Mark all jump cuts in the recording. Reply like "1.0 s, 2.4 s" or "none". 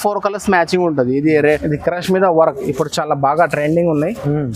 1.6 s